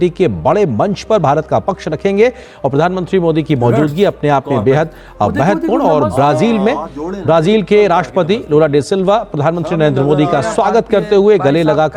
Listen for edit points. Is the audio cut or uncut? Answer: uncut